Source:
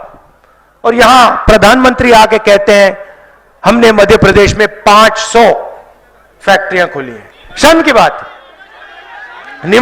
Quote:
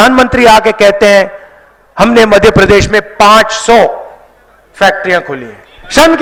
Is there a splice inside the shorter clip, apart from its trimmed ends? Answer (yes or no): no